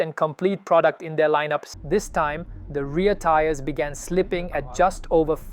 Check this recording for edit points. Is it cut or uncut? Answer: cut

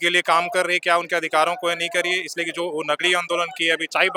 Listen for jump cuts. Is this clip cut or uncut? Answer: uncut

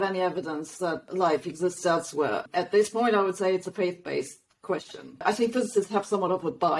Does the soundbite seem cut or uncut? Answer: cut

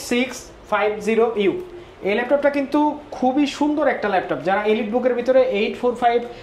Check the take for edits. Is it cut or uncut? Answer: uncut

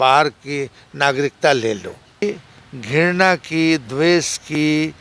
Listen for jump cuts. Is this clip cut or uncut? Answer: cut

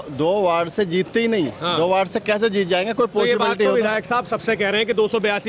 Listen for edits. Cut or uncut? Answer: uncut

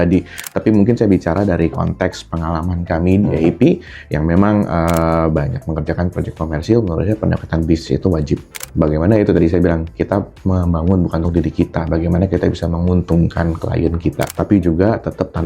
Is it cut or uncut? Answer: cut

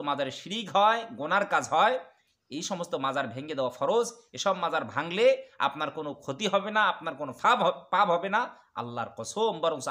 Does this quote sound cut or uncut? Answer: uncut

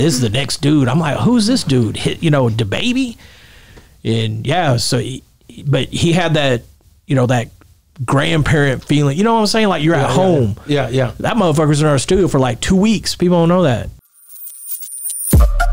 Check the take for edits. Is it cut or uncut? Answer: cut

